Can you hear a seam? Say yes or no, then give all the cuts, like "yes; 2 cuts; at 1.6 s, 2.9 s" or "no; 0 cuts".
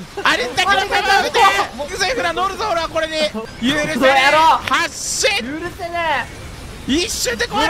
yes; 2 cuts; at 1.9 s, 3.4 s